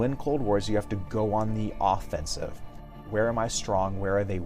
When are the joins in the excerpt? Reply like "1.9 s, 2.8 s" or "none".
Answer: 3.0 s